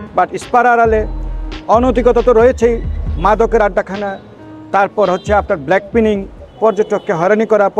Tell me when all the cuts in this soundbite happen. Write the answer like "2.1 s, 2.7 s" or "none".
none

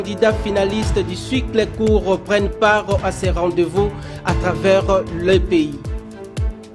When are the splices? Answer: 5.8 s

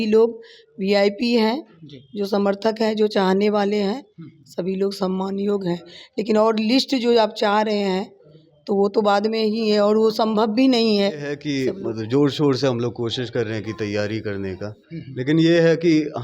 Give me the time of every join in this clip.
11.4 s

